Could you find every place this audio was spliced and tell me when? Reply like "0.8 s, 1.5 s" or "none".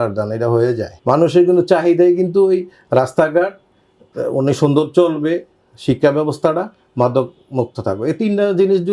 0.9 s